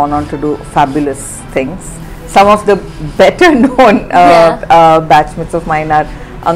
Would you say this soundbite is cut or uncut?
uncut